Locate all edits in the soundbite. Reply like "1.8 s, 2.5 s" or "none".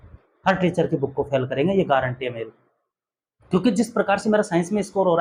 none